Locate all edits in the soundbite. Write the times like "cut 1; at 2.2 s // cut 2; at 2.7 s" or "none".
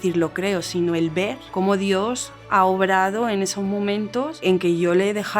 cut 1; at 1.4 s // cut 2; at 4.4 s